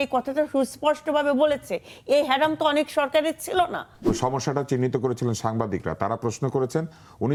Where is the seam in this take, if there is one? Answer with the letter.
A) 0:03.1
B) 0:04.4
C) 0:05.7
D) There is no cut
D